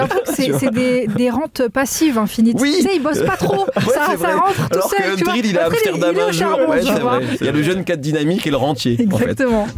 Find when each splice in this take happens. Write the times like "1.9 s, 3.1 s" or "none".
7.3 s